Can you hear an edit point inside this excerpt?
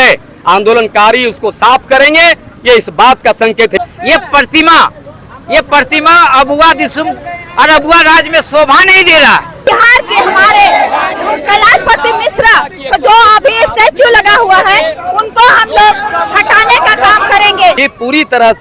yes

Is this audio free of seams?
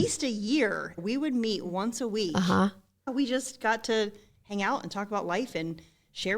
no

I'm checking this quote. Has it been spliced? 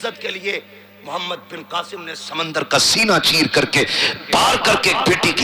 no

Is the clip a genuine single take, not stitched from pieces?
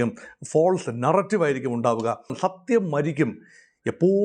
no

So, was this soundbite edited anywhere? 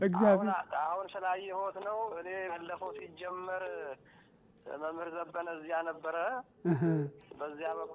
no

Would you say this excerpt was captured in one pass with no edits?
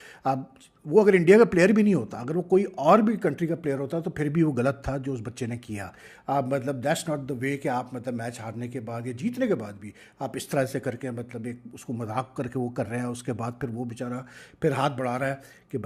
yes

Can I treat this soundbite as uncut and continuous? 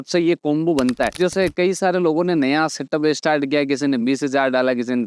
yes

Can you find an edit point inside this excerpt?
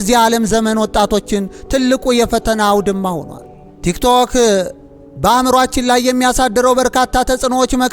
no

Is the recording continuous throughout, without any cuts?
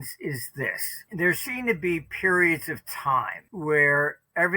no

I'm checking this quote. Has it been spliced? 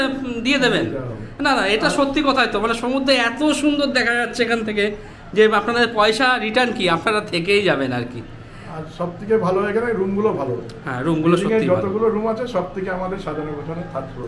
no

